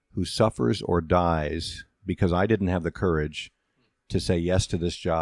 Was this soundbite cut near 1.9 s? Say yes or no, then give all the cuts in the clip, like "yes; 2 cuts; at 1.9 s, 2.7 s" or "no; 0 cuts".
no; 0 cuts